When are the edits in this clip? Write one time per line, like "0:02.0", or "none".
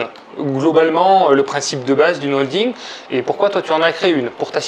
none

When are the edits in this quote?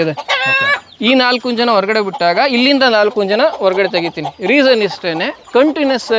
none

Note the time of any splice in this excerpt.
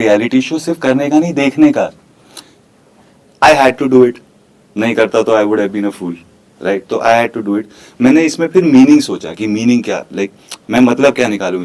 none

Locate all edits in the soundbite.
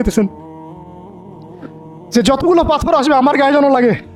none

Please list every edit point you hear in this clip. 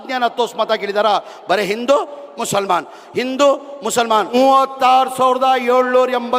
0:04.3

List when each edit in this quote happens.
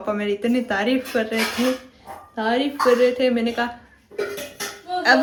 none

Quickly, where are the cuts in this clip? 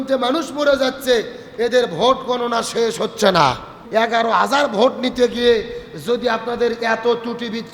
0:03.7

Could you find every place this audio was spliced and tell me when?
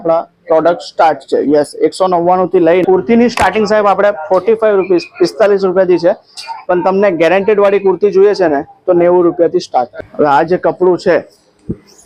0:02.8
0:10.0

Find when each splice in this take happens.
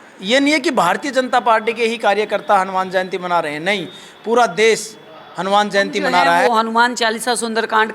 0:06.4

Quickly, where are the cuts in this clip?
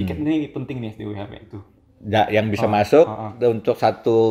0:01.6

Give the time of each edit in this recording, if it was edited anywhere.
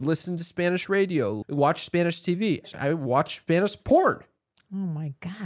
0:01.4
0:02.7

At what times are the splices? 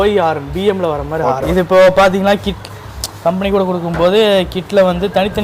0:01.5

